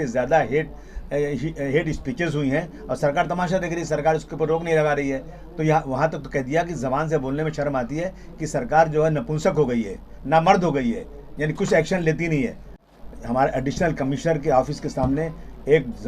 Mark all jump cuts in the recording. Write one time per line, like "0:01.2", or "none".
0:12.7